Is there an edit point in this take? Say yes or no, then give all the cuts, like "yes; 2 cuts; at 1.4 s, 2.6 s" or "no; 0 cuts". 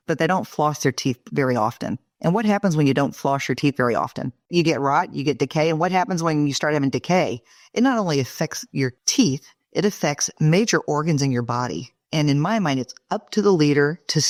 no; 0 cuts